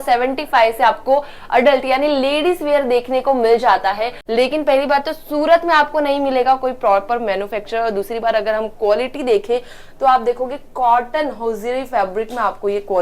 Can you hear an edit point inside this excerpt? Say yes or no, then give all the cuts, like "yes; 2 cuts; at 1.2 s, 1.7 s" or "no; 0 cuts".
yes; 1 cut; at 4.1 s